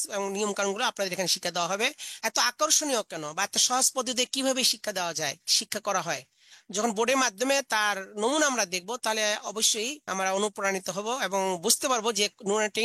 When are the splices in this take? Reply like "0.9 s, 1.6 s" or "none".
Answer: 2.1 s, 10.0 s